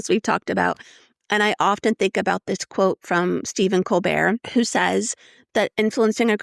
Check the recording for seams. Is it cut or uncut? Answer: cut